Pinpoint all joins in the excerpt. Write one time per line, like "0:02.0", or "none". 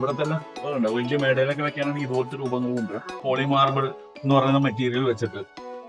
0:03.1